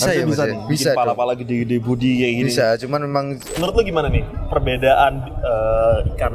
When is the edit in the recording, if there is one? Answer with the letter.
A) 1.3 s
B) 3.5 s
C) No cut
B